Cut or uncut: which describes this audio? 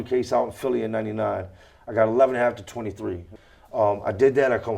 cut